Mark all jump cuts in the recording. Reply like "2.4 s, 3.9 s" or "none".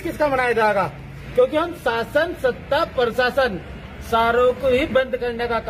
none